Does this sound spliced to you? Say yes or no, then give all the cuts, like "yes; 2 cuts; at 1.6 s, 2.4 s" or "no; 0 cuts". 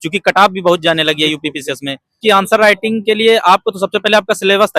yes; 1 cut; at 2.1 s